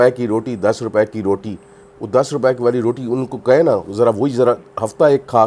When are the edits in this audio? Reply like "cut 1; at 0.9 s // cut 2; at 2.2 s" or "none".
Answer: none